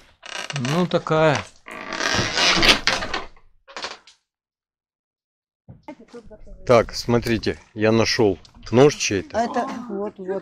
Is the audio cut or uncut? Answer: cut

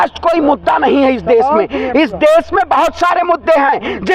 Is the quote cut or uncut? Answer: uncut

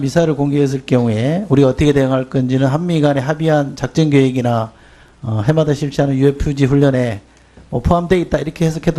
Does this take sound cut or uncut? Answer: cut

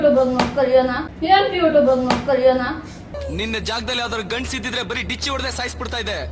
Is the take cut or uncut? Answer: uncut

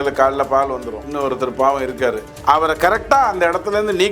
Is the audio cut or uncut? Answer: cut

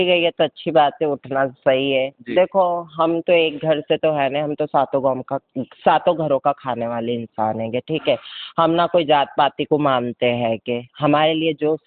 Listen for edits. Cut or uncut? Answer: uncut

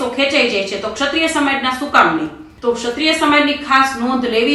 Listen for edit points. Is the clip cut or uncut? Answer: cut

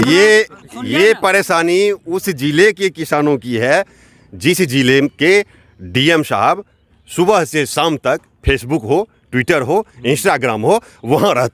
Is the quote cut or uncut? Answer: uncut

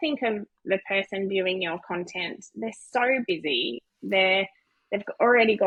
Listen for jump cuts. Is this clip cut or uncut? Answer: uncut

